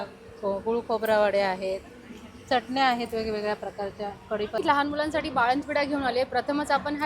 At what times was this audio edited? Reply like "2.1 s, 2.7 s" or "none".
4.6 s